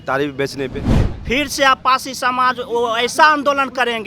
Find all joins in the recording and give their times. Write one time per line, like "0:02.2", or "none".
0:01.1